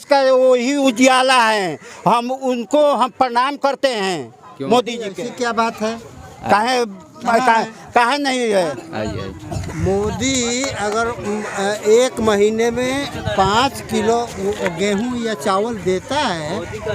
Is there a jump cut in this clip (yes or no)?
yes